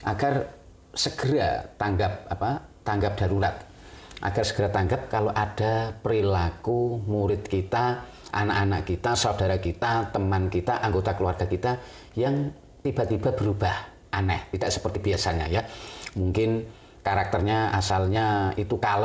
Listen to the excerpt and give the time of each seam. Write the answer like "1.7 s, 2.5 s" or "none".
none